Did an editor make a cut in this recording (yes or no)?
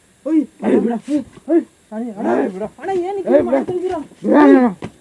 no